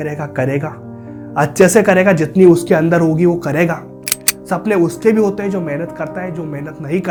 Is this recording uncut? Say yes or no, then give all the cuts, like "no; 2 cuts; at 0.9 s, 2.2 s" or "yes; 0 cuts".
yes; 0 cuts